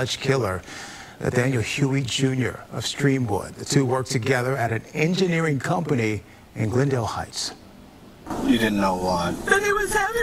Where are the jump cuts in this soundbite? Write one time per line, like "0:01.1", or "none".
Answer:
0:01.3
0:06.2
0:08.3